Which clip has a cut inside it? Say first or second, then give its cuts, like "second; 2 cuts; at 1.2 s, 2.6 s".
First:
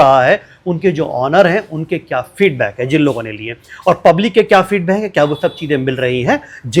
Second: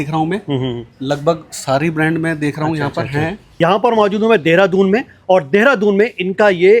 second; 1 cut; at 3.4 s